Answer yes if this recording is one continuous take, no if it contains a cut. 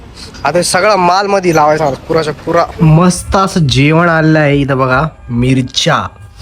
no